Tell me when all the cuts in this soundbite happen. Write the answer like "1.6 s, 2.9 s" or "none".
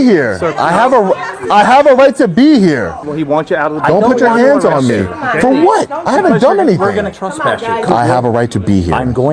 3.0 s, 7.9 s

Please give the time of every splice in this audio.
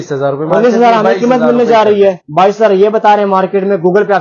none

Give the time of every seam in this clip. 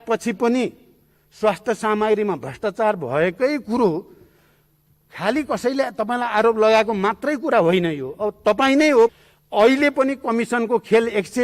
9.1 s

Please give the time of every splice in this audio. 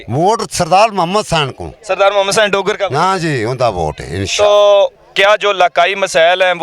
none

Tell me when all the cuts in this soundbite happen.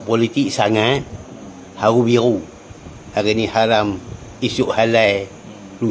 none

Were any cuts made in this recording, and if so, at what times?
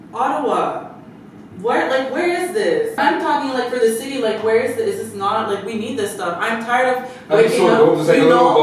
3.0 s

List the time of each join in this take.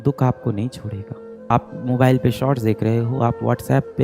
1.3 s

